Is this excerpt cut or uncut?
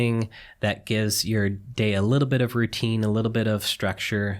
uncut